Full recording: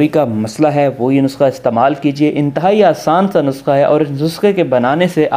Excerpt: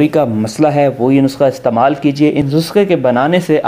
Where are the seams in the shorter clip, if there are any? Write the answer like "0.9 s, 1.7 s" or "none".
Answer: 2.5 s